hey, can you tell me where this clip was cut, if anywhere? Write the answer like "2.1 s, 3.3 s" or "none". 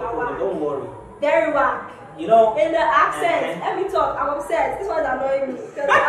none